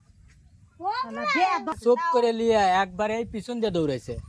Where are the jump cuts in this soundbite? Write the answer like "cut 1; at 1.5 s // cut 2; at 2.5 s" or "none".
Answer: cut 1; at 1.8 s